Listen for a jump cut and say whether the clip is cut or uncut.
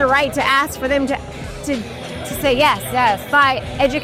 uncut